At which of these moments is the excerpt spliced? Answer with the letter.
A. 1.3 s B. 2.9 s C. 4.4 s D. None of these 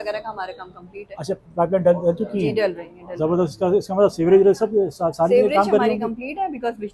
D